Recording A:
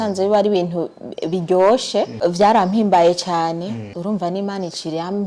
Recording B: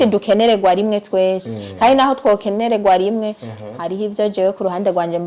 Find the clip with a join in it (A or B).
A